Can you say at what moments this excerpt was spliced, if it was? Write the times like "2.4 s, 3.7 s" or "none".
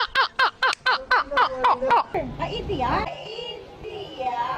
2.1 s